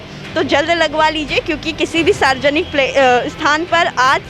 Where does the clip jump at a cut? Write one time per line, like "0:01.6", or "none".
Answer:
none